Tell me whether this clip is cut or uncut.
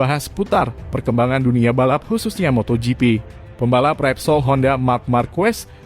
cut